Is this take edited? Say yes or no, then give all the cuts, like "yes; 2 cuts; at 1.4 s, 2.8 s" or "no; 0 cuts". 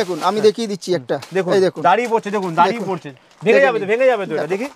no; 0 cuts